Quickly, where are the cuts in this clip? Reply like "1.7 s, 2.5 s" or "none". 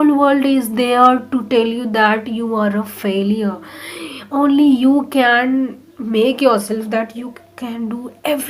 none